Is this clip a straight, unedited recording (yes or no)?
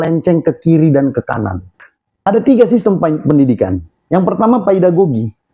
no